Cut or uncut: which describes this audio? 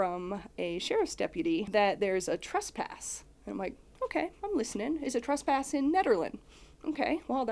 cut